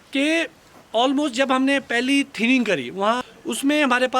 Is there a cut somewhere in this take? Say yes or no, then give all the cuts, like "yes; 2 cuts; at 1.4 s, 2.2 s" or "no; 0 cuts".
yes; 1 cut; at 3.2 s